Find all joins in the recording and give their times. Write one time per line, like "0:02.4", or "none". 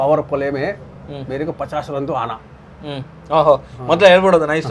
none